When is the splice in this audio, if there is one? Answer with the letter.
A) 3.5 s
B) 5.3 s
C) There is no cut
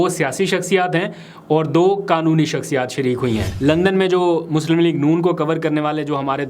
A